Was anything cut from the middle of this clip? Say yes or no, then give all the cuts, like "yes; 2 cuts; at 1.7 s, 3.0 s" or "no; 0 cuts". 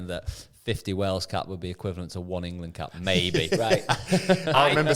no; 0 cuts